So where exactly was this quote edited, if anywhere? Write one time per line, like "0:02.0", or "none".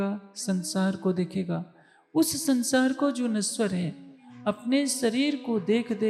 none